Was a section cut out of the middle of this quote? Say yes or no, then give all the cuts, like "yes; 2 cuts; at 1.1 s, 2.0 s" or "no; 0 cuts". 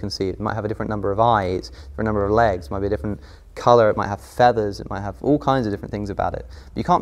no; 0 cuts